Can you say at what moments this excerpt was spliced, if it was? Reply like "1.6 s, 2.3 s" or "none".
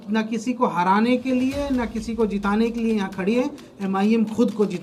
none